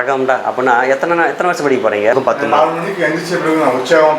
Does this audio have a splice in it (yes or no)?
yes